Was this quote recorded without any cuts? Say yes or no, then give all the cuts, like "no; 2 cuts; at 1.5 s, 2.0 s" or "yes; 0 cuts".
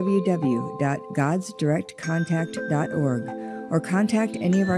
yes; 0 cuts